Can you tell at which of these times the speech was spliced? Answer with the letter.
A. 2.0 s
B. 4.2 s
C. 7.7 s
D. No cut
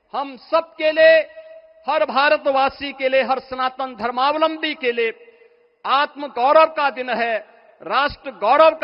D